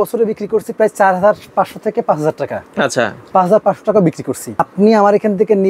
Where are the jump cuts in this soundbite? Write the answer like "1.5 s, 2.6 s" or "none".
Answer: 4.7 s